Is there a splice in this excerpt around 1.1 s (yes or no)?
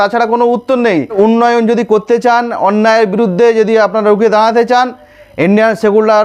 yes